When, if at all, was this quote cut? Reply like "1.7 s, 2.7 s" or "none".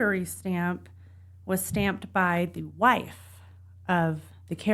none